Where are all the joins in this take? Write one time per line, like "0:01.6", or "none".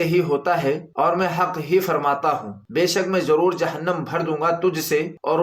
none